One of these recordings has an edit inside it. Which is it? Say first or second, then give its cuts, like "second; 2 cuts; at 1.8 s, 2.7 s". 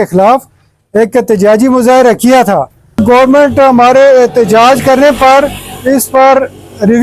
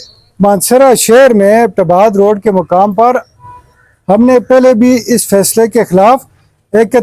first; 1 cut; at 3.0 s